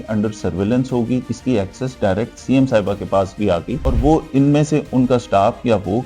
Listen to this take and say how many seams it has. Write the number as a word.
two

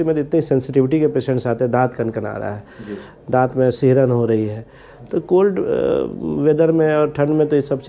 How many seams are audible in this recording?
zero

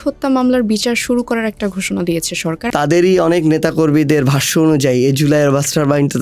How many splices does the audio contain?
one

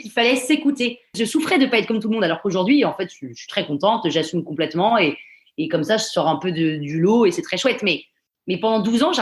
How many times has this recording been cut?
one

